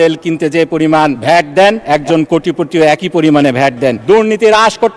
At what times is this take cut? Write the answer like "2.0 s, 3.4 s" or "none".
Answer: 1.2 s, 1.8 s, 4.0 s